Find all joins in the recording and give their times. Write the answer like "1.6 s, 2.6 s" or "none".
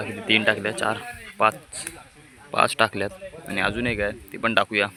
none